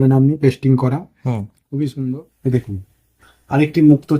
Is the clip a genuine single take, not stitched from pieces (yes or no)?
no